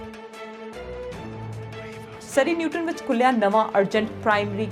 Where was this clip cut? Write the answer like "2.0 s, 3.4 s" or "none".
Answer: 2.1 s

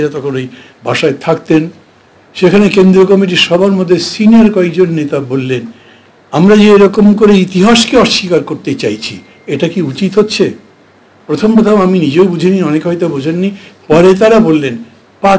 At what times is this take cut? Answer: none

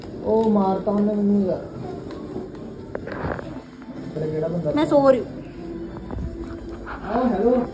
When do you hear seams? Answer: 4.2 s

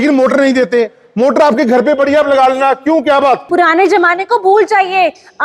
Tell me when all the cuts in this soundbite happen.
3.4 s

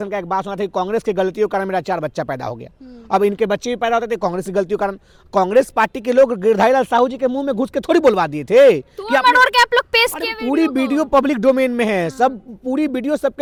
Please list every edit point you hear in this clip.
none

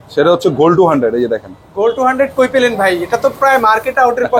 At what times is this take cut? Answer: none

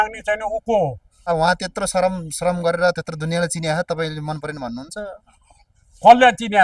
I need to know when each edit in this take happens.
1.1 s

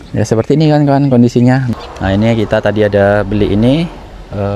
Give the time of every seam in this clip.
1.7 s

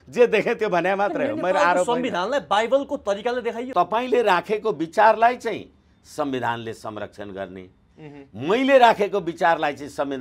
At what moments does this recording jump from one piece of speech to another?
3.7 s

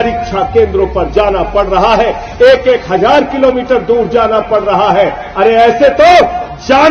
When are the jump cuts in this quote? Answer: none

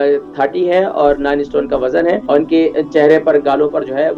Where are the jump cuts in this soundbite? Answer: 2.2 s

